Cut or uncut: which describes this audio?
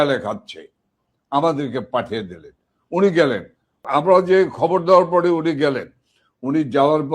cut